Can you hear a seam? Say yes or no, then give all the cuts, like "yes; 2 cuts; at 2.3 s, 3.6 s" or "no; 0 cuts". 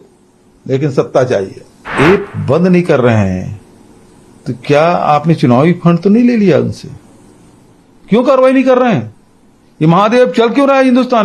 yes; 1 cut; at 1.8 s